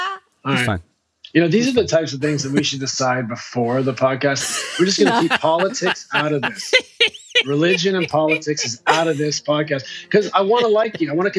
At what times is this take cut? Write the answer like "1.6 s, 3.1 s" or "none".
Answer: 4.4 s